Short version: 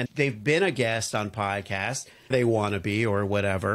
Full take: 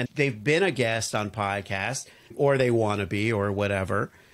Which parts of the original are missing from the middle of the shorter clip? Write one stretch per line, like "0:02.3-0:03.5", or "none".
0:02.3-0:02.6